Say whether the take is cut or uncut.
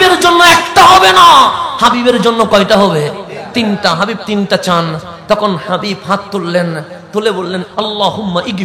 cut